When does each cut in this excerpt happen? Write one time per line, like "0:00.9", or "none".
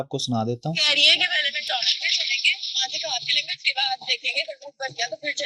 none